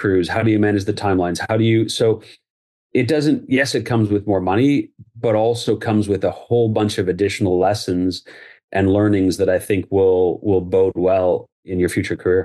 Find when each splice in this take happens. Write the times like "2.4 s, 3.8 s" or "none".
11.6 s